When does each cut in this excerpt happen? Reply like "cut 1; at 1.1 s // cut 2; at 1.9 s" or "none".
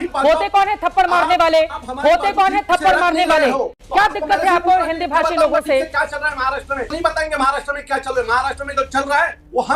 cut 1; at 3.7 s // cut 2; at 6.9 s